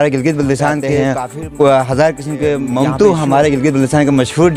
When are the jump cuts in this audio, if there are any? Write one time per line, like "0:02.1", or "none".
0:00.9
0:02.7